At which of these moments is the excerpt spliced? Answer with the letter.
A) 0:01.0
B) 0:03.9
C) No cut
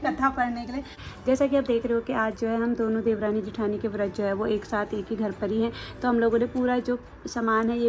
A